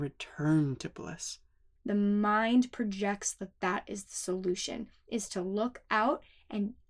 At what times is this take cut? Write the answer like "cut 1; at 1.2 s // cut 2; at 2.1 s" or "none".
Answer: cut 1; at 1.7 s